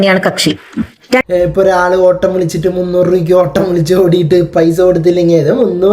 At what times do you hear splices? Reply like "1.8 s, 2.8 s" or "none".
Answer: 1.2 s